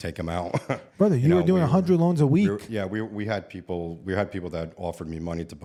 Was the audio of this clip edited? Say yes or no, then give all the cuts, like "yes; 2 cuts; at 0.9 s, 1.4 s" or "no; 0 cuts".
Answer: no; 0 cuts